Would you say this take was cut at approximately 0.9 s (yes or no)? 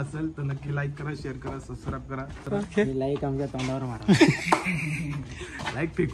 no